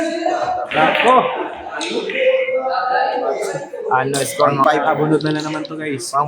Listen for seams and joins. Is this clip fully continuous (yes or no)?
no